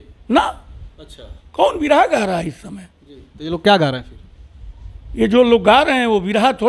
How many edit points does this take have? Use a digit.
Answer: 0